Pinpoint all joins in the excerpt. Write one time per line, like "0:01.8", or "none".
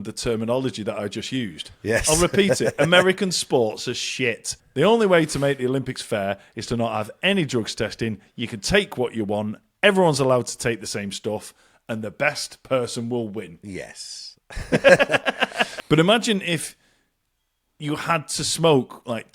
0:04.5
0:15.7